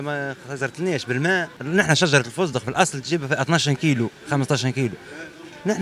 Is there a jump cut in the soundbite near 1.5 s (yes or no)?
yes